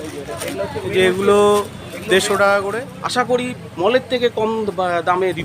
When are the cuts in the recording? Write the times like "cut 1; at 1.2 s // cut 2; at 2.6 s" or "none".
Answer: cut 1; at 2.9 s